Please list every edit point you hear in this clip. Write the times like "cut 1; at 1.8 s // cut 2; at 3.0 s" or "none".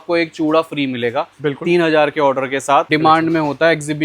cut 1; at 2.9 s